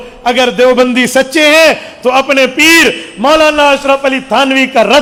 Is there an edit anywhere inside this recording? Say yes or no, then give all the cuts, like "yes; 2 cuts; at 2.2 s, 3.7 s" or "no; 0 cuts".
no; 0 cuts